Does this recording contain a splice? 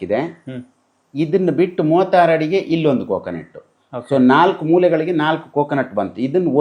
no; 0 cuts

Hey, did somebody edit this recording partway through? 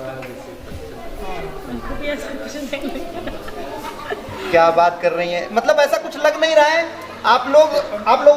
no; 0 cuts

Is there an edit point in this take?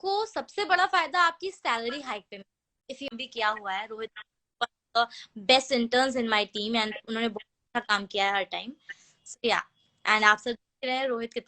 yes; 1 cut; at 3.1 s

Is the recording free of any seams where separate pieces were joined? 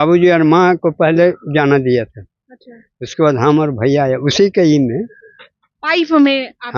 yes; 0 cuts

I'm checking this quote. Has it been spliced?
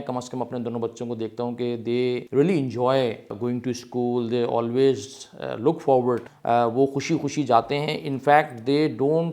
yes; 3 cuts; at 2.2 s, 3.3 s, 6.3 s

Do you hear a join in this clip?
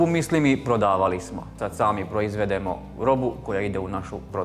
yes; 1 cut; at 1.6 s

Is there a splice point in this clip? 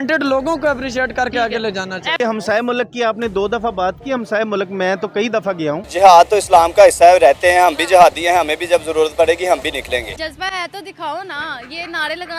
yes; 3 cuts; at 2.1 s, 5.8 s, 10.1 s

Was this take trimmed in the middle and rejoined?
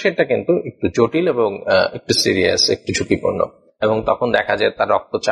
yes; 1 cut; at 3.6 s

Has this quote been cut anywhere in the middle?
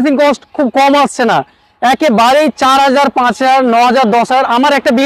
no; 0 cuts

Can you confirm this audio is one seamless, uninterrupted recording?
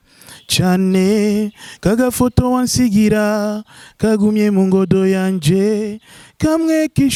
yes; 0 cuts

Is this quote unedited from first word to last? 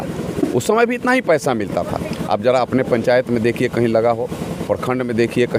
yes; 0 cuts

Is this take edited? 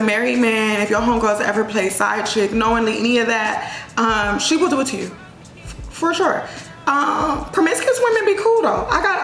no; 0 cuts

